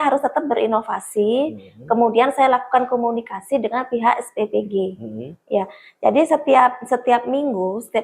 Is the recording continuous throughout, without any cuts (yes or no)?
yes